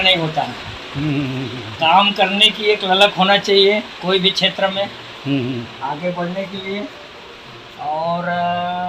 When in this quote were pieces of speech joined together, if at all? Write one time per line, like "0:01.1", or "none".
none